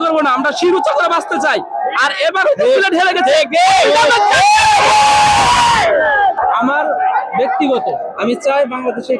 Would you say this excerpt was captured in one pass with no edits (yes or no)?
yes